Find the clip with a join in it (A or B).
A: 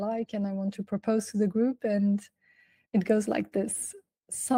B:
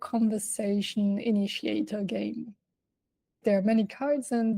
B